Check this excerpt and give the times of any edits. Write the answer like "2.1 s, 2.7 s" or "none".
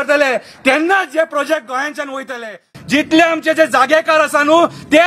2.8 s